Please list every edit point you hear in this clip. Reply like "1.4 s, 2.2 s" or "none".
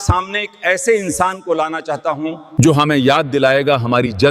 2.4 s

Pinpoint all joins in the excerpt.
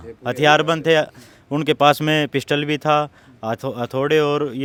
none

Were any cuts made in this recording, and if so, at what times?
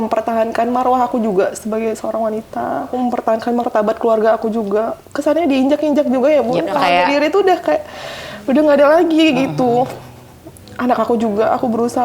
2.9 s, 5.0 s, 6.8 s

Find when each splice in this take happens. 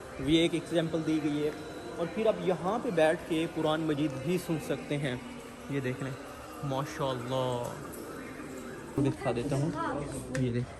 9.0 s

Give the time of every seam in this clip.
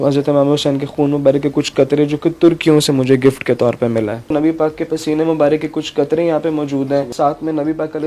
4.2 s, 7.1 s

